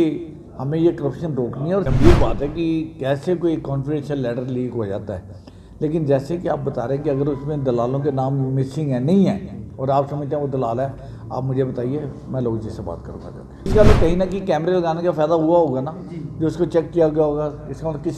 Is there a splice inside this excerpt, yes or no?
yes